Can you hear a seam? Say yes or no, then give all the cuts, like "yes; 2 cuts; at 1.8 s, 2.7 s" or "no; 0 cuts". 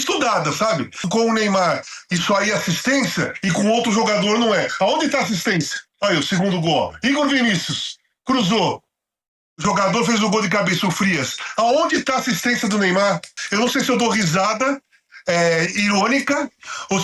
yes; 3 cuts; at 1.1 s, 5.8 s, 13.4 s